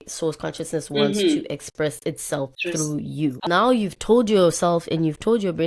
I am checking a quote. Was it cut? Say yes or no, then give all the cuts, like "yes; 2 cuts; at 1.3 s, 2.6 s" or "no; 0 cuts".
yes; 1 cut; at 3.4 s